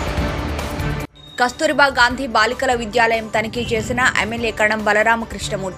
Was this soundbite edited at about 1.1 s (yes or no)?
yes